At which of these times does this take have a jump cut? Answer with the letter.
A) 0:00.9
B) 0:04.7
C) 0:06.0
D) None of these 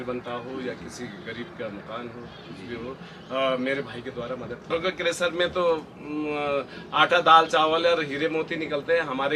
B